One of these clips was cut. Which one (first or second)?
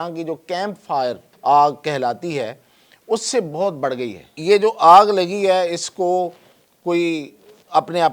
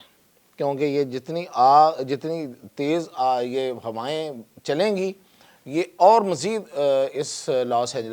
first